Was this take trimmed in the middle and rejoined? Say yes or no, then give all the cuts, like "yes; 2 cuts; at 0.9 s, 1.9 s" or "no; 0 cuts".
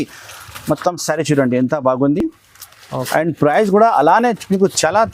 no; 0 cuts